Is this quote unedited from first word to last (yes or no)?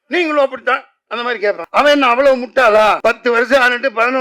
no